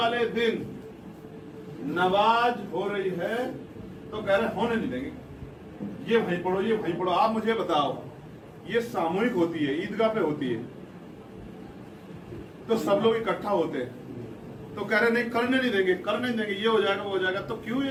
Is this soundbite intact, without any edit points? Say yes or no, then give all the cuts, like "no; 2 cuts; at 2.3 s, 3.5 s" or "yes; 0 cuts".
yes; 0 cuts